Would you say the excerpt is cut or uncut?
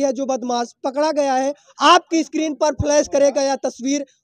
uncut